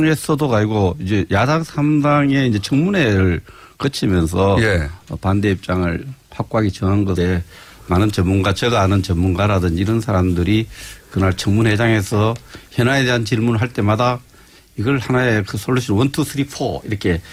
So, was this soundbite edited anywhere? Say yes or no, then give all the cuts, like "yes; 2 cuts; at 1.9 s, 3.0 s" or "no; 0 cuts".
no; 0 cuts